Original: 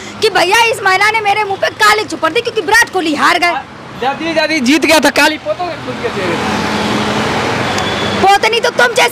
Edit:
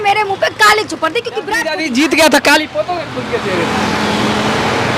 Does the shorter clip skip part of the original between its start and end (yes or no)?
yes